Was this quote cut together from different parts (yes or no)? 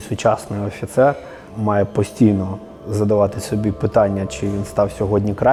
no